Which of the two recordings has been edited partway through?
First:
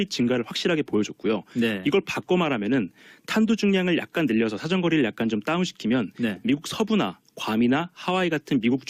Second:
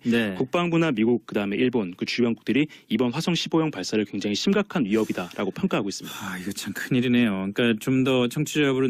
second; 1 cut; at 4.5 s

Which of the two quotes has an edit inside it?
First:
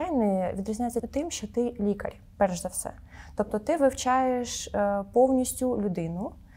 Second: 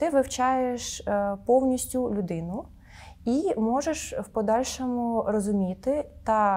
first; 1 cut; at 1.1 s

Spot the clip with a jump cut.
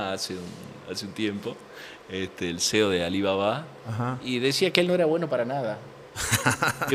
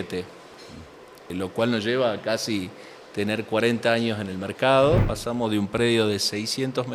second; 2 cuts; at 1.3 s, 5.1 s

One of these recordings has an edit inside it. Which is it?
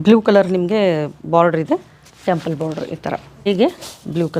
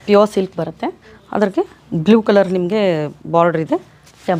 first; 1 cut; at 3.5 s

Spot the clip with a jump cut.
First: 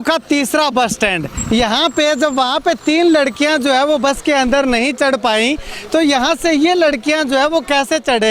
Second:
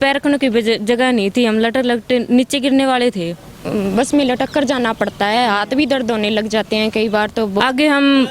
second; 2 cuts; at 3.6 s, 7.6 s

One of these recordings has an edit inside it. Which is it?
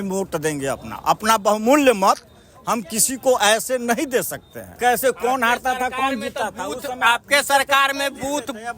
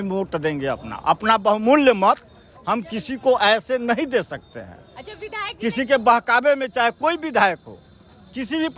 first; 1 cut; at 4.8 s

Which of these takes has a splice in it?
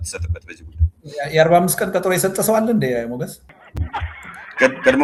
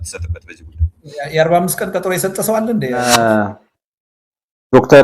second; 1 cut; at 3.0 s

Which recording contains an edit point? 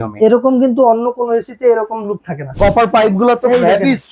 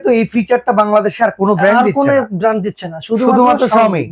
first; 1 cut; at 2.4 s

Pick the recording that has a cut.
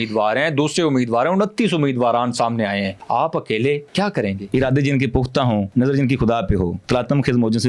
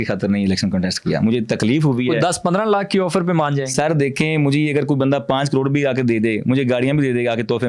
first; 4 cuts; at 3.0 s, 4.2 s, 5.7 s, 6.8 s

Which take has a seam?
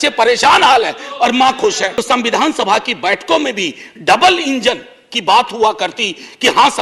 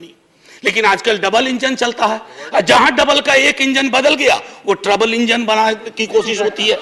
first; 1 cut; at 1.9 s

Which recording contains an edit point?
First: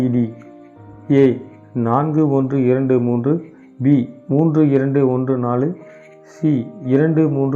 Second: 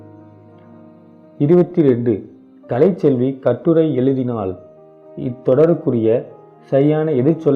second; 1 cut; at 1.4 s

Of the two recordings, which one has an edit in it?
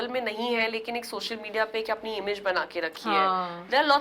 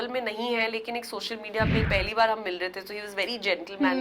second; 1 cut; at 1.8 s

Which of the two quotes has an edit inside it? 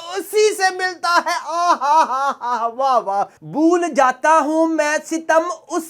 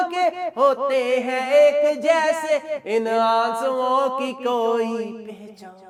first; 1 cut; at 3.3 s

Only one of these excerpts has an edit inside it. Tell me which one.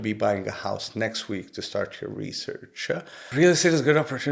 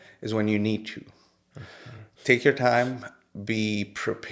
first; 1 cut; at 3.2 s

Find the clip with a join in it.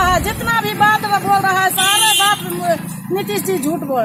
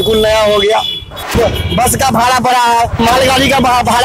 second; 2 cuts; at 1.3 s, 3.0 s

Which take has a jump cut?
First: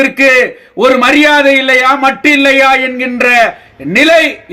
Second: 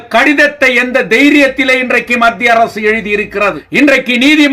second; 1 cut; at 3.6 s

